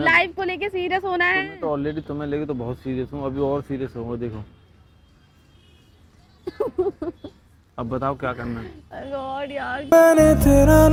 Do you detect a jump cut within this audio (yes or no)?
no